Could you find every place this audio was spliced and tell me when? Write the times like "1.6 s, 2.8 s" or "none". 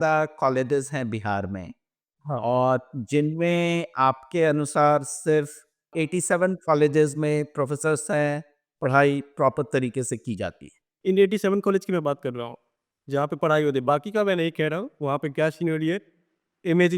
5.9 s, 10.9 s